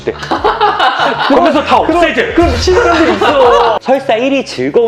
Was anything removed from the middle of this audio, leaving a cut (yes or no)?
yes